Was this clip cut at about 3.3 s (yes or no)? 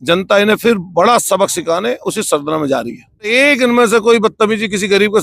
yes